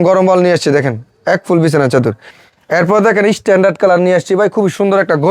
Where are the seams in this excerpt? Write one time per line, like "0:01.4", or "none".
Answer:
0:02.2